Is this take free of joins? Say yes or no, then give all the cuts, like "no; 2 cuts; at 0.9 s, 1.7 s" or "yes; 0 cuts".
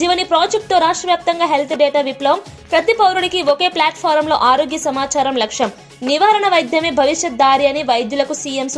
yes; 0 cuts